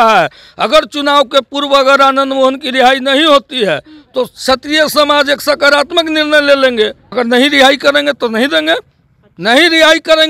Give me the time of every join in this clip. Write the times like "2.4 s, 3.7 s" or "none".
7.2 s